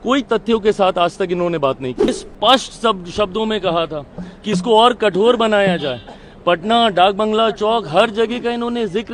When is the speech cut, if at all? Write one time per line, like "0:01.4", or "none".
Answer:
0:02.1